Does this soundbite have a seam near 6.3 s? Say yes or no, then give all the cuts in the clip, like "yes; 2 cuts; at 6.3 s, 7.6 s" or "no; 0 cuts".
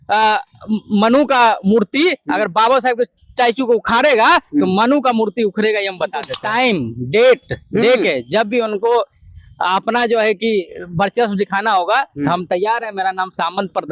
yes; 1 cut; at 6.3 s